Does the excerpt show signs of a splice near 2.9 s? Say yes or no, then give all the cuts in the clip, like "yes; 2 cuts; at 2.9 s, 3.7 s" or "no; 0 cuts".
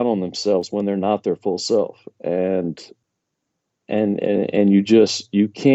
yes; 1 cut; at 2.9 s